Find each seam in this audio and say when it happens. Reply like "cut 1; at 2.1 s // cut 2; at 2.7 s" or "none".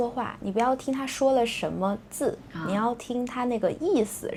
none